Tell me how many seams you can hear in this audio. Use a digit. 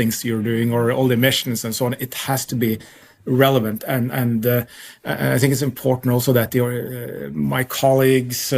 0